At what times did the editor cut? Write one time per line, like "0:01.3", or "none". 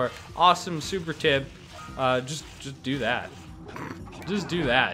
none